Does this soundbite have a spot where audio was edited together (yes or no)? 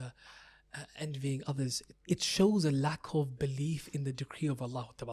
yes